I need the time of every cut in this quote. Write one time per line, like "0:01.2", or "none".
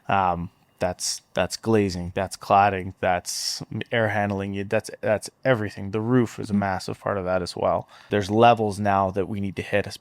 0:08.0